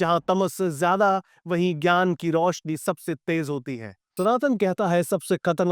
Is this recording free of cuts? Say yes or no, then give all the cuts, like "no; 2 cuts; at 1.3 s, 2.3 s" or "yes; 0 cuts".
no; 1 cut; at 4.0 s